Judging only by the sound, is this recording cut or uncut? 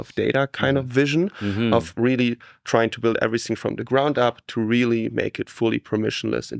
uncut